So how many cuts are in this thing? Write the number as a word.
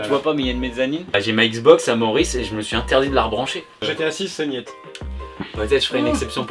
two